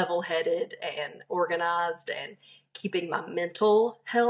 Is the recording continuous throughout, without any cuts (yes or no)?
yes